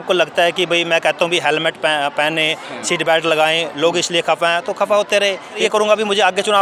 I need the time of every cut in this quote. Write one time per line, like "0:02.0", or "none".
0:05.6